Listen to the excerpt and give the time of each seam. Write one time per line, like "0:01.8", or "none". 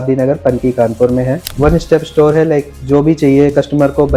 0:01.5